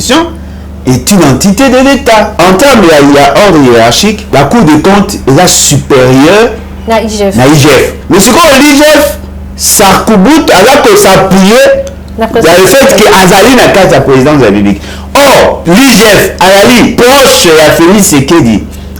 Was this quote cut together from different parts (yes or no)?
yes